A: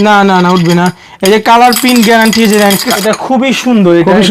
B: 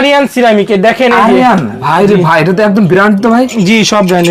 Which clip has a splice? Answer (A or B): A